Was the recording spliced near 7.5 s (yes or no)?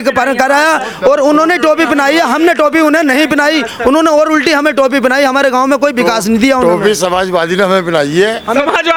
no